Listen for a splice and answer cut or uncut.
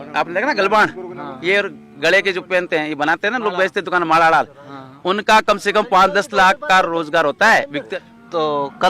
cut